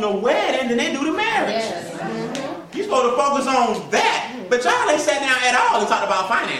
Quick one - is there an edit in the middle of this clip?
no; 0 cuts

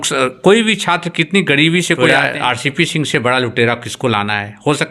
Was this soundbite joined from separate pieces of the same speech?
yes; 1 cut; at 2.1 s

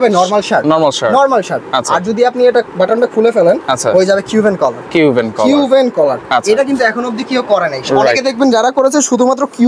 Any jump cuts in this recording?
no; 0 cuts

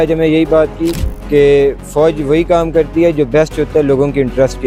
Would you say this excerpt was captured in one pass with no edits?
yes; 0 cuts

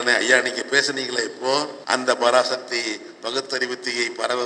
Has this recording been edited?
yes; 1 cut; at 1.8 s

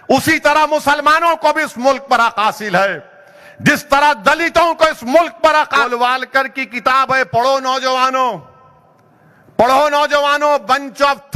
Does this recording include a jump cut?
yes; 1 cut; at 5.9 s

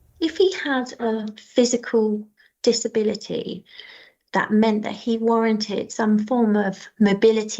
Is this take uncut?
no; 1 cut; at 0.9 s

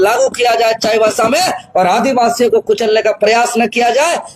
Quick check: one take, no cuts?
yes; 0 cuts

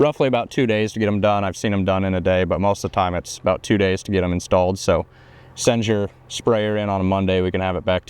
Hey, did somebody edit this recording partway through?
no; 0 cuts

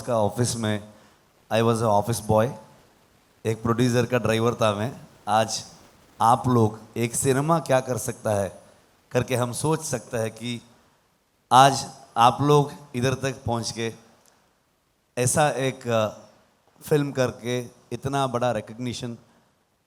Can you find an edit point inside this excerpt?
no; 0 cuts

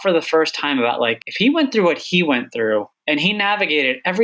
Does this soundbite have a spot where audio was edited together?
yes; 2 cuts; at 1.2 s, 2.9 s

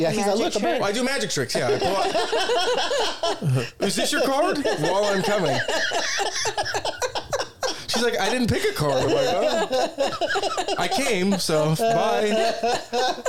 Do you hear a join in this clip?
no; 0 cuts

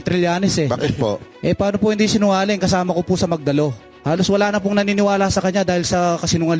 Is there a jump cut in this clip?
yes; 2 cuts; at 1.3 s, 3.9 s

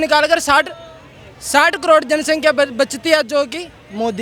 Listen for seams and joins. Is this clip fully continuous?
yes; 0 cuts

